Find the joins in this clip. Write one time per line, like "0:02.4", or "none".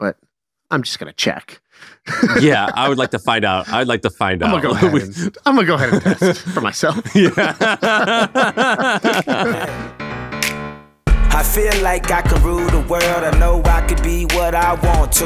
0:09.8